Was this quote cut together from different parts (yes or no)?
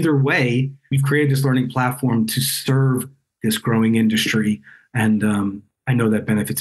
yes